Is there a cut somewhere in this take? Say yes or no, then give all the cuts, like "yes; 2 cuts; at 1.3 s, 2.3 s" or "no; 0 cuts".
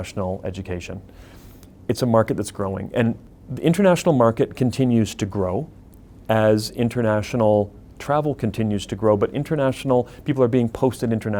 yes; 1 cut; at 3.2 s